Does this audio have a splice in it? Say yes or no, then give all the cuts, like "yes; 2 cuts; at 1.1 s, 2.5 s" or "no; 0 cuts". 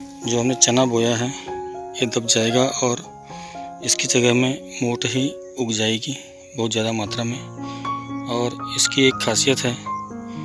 no; 0 cuts